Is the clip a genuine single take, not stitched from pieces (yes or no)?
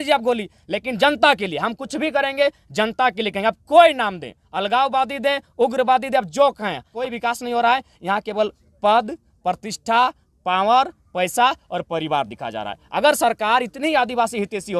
no